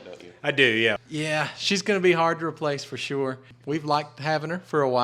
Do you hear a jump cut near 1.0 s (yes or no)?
yes